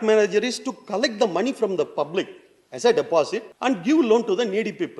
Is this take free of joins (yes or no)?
no